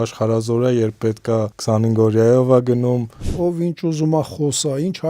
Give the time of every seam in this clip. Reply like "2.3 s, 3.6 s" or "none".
1.5 s, 3.3 s